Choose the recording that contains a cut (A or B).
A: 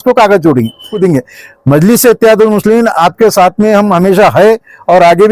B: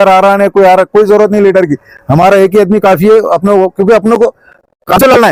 A